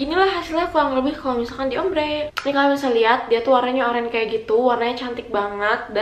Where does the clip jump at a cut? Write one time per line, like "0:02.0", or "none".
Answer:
0:02.3